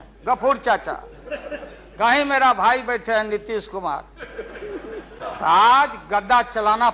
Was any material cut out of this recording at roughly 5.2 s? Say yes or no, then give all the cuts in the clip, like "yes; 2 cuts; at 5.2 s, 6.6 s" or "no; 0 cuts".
yes; 1 cut; at 5.2 s